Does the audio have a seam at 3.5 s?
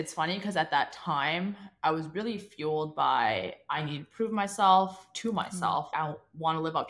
no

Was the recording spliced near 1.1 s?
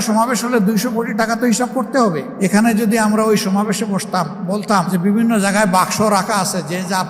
no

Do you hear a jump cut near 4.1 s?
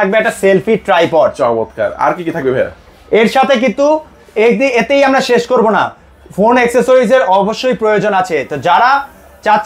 no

